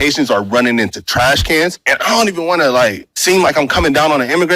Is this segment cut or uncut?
cut